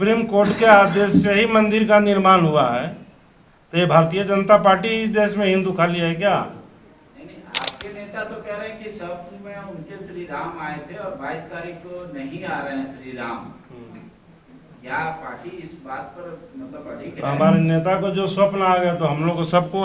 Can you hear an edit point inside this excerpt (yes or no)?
no